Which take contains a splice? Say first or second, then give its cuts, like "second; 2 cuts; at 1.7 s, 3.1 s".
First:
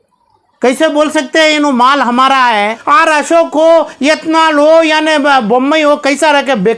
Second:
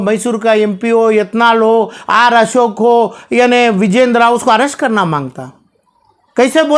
first; 1 cut; at 2.8 s